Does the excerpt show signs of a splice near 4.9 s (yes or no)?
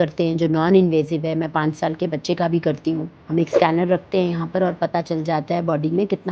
no